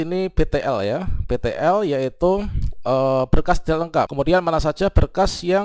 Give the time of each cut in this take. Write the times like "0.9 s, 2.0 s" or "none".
4.1 s